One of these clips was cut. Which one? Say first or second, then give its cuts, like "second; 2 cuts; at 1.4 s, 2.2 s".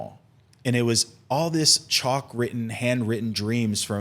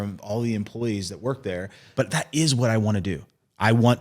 second; 1 cut; at 1.8 s